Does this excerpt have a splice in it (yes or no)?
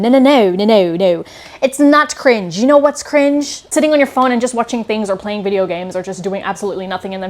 yes